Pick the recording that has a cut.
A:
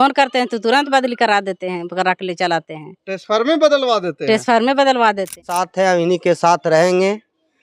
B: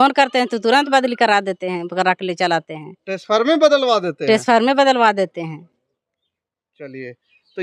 A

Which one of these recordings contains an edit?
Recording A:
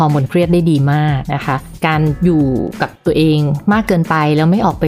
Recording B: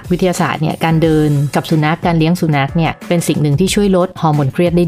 A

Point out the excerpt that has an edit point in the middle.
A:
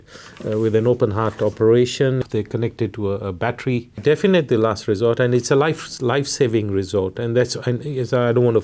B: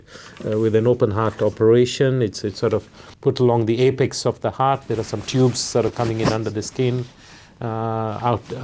A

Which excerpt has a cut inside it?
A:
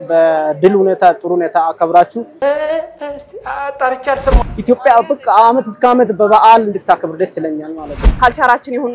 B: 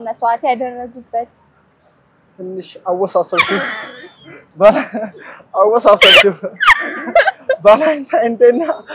A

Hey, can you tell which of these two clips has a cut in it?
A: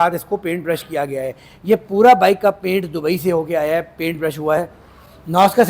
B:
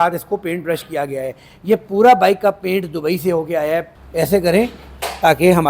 B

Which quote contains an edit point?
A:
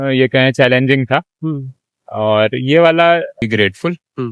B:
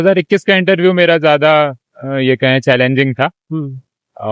A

